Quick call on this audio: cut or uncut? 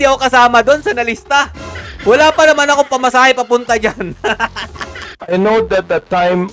cut